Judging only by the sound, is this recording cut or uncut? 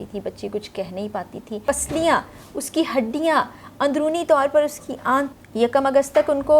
cut